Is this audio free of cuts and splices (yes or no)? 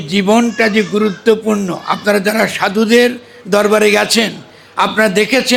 yes